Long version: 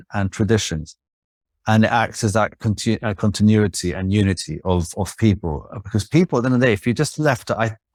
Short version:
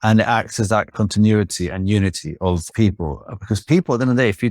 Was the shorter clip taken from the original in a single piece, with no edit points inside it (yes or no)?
no